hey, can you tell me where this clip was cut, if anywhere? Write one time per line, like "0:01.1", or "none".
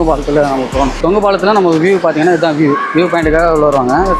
0:01.0